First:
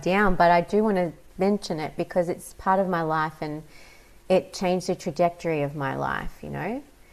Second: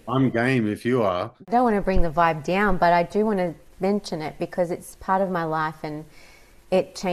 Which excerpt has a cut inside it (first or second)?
second